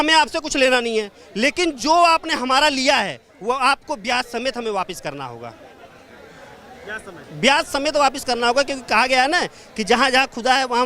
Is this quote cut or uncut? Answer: uncut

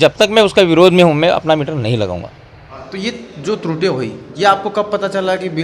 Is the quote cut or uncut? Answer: cut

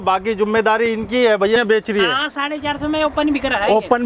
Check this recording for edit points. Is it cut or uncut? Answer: cut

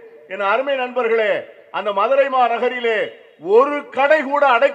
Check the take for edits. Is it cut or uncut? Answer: uncut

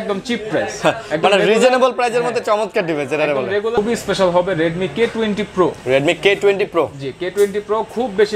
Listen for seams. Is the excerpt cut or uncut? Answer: cut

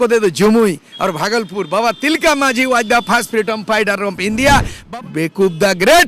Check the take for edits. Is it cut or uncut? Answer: cut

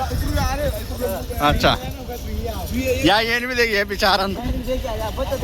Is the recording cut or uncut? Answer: uncut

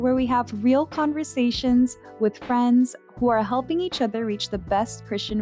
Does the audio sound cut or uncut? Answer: uncut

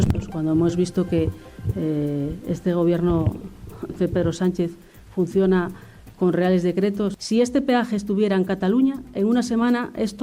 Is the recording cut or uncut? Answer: cut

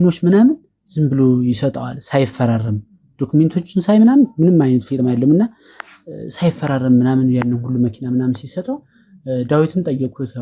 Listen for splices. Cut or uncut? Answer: uncut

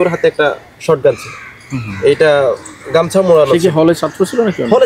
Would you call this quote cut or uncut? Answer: uncut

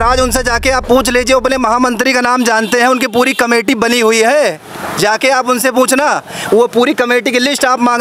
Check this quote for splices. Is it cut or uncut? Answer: uncut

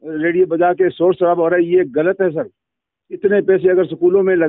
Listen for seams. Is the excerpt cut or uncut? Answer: uncut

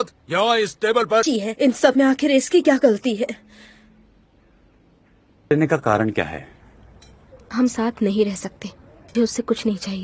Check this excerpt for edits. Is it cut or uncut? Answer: cut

